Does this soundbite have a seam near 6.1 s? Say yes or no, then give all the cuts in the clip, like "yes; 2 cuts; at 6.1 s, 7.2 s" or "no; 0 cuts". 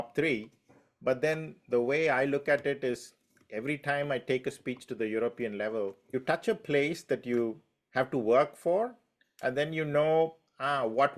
yes; 1 cut; at 6.1 s